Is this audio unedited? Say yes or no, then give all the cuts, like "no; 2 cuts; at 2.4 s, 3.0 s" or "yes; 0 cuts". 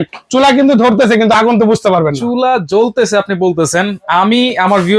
yes; 0 cuts